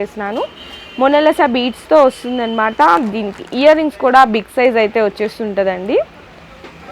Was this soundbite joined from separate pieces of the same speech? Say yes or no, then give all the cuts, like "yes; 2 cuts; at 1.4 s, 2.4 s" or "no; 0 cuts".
no; 0 cuts